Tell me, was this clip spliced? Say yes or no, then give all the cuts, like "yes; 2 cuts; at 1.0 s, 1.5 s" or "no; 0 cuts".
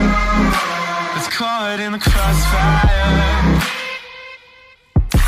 yes; 1 cut; at 1.1 s